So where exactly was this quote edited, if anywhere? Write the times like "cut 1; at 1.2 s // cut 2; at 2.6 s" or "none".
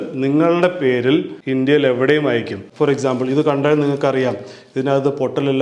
cut 1; at 1.4 s // cut 2; at 2.6 s